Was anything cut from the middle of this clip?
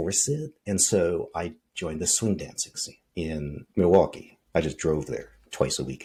no; 0 cuts

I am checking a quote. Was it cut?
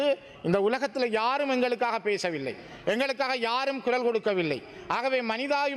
no; 0 cuts

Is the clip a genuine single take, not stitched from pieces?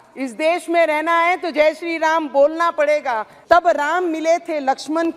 no; 1 cut; at 3.3 s

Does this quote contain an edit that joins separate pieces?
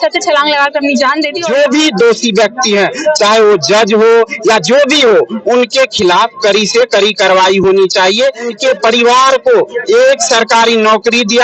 yes; 2 cuts; at 1.4 s, 8.5 s

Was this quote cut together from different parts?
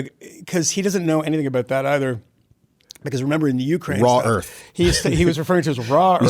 no; 0 cuts

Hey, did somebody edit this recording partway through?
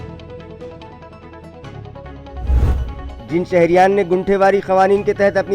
yes; 1 cut; at 3.0 s

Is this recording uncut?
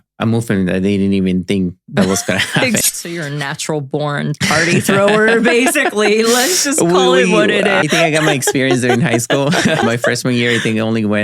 no; 3 cuts; at 2.8 s, 7.8 s, 9.8 s

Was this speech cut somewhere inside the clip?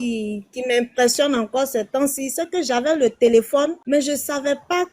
yes; 1 cut; at 3.8 s

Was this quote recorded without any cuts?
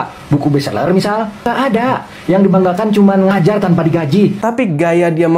no; 1 cut; at 4.4 s

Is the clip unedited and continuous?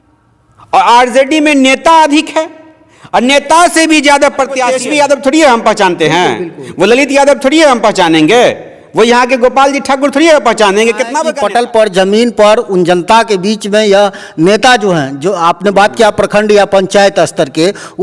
no; 2 cuts; at 4.7 s, 11.3 s

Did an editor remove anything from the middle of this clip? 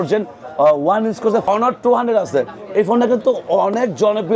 yes; 1 cut; at 1.4 s

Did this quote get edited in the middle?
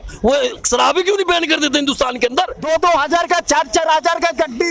yes; 1 cut; at 2.6 s

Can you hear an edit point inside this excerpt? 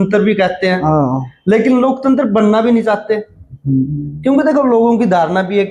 no; 0 cuts

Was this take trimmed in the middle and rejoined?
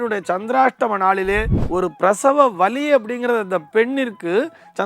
yes; 1 cut; at 1.6 s

